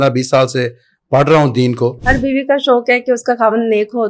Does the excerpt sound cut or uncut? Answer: cut